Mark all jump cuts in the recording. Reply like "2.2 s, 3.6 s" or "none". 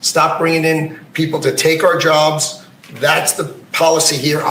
none